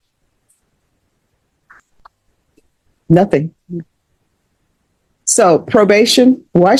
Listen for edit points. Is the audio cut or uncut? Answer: uncut